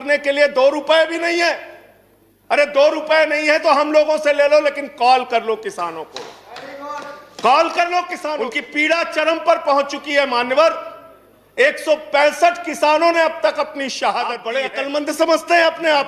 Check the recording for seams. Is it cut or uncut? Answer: cut